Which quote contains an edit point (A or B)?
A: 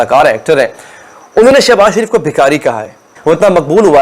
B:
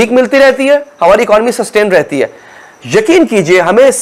A